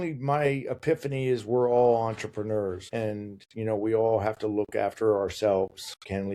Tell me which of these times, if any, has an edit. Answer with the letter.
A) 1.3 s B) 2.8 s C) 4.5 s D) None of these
B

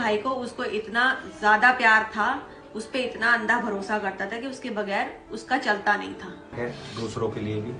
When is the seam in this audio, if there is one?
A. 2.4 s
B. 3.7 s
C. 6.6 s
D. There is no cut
C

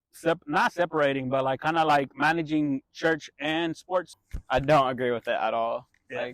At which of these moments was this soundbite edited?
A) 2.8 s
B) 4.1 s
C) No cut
B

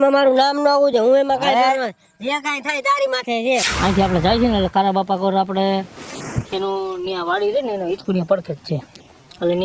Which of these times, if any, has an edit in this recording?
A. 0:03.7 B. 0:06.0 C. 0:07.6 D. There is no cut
A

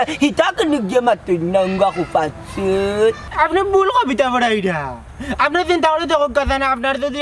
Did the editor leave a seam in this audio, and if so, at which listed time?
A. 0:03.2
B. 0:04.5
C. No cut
A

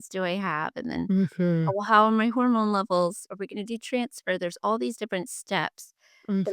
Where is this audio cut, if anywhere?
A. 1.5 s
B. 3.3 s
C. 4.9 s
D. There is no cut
B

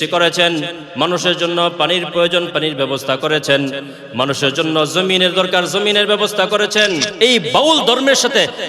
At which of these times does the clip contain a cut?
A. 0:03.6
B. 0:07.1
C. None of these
B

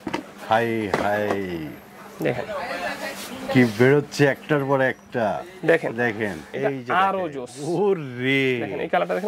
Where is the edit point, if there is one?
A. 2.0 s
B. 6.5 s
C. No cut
B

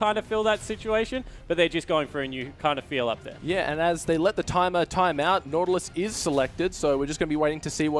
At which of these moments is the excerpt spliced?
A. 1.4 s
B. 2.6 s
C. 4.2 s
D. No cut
A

